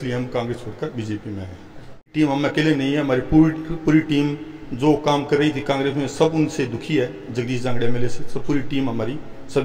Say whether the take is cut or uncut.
cut